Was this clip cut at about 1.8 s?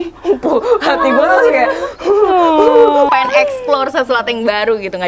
no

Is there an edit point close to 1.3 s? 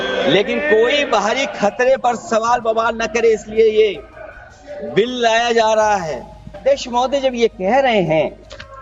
no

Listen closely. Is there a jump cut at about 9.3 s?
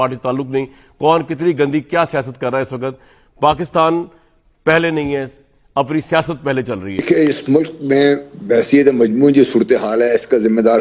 no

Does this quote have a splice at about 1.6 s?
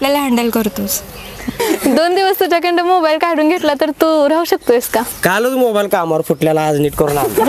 yes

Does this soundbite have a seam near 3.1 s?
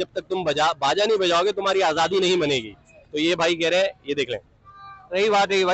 no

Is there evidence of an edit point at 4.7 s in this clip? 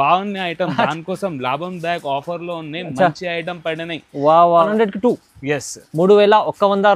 yes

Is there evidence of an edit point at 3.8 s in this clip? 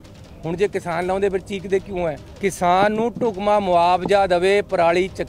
no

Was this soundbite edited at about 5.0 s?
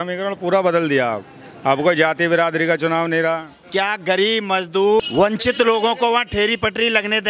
yes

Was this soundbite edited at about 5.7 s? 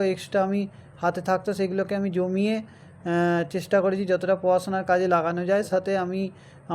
yes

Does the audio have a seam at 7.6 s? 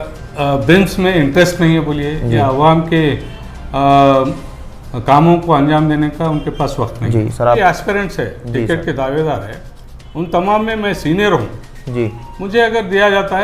yes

